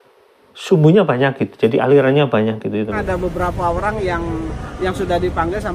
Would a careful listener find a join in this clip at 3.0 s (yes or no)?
yes